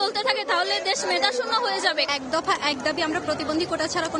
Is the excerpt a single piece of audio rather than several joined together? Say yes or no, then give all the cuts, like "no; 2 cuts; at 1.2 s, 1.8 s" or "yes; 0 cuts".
yes; 0 cuts